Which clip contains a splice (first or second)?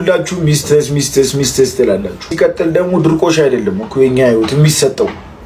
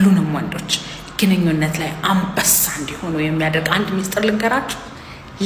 first